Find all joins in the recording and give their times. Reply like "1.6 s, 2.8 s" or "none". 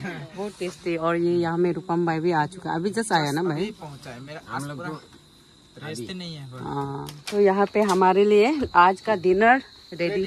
7.2 s